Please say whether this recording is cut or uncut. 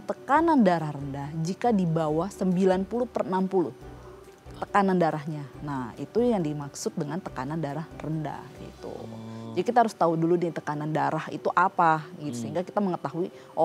uncut